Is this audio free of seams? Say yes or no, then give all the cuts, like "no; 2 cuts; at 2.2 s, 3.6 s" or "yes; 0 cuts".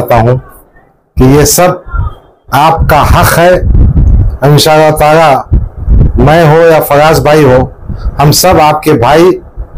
yes; 0 cuts